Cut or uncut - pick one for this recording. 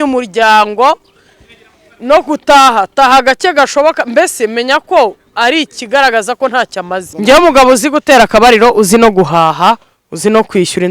cut